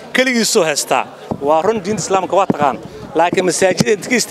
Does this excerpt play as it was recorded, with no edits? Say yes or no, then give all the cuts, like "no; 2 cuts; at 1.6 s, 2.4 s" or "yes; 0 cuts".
no; 1 cut; at 1.2 s